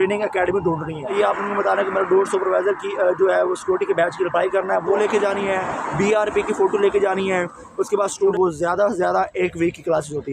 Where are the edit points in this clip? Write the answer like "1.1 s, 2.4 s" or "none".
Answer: 1.1 s, 5.0 s, 8.3 s